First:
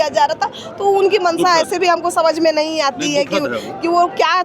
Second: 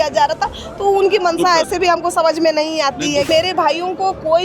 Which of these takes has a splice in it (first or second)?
second